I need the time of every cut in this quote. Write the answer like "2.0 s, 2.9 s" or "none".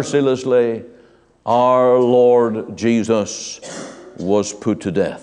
none